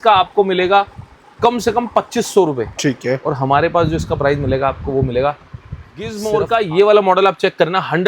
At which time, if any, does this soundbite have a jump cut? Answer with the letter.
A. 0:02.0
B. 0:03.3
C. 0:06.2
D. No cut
C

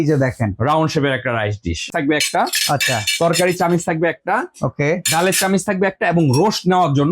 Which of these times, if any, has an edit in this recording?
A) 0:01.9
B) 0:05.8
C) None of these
A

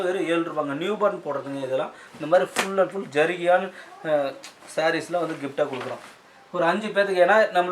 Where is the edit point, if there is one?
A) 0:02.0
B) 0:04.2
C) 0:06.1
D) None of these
A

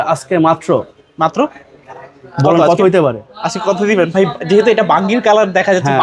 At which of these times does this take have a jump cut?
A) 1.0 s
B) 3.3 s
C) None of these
C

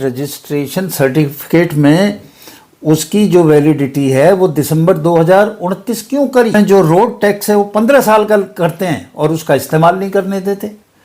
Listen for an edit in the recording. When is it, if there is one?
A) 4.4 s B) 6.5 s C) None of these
B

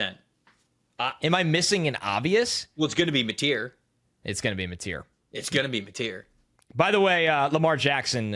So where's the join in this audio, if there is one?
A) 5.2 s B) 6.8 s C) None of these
B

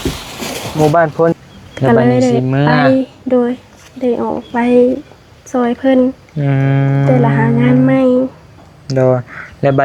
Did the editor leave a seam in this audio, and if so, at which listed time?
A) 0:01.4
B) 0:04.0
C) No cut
A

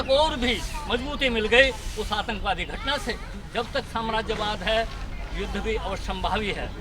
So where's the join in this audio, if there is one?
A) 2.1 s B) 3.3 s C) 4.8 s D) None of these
B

